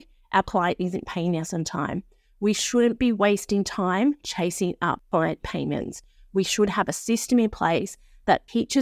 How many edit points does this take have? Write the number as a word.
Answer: one